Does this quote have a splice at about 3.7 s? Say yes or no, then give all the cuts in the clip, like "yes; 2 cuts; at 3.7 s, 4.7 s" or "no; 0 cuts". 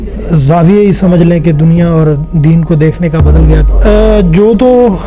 yes; 1 cut; at 3.7 s